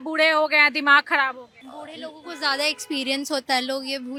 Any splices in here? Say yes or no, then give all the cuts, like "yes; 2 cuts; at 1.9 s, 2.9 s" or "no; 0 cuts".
no; 0 cuts